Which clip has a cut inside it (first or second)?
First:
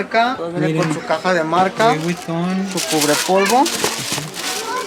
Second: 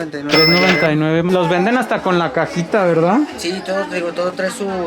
second